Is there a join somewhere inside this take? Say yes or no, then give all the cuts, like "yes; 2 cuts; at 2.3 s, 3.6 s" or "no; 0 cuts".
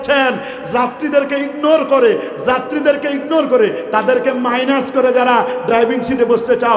no; 0 cuts